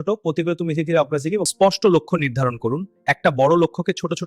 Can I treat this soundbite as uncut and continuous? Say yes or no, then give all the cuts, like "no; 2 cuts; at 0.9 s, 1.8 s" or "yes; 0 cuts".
no; 1 cut; at 1.5 s